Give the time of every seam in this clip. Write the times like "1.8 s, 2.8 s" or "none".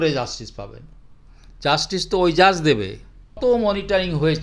3.4 s